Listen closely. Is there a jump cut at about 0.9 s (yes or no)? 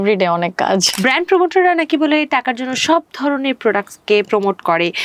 yes